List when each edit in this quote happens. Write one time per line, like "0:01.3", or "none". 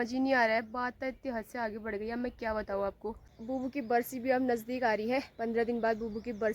0:03.3